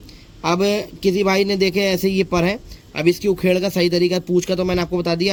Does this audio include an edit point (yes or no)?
no